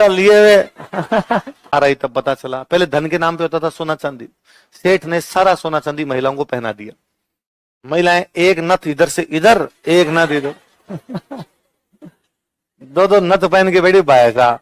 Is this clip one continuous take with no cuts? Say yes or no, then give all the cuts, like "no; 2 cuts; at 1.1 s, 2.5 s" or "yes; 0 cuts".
no; 1 cut; at 1.7 s